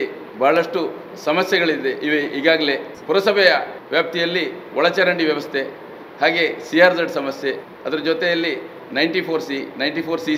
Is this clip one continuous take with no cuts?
no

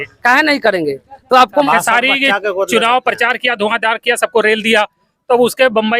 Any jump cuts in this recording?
yes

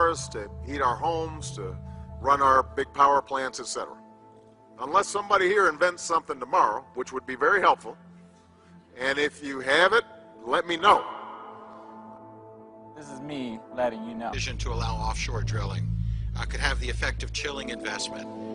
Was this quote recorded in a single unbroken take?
yes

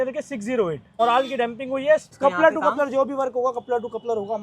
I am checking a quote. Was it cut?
yes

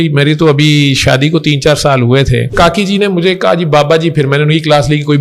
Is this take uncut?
no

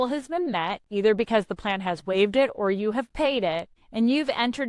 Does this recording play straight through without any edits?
no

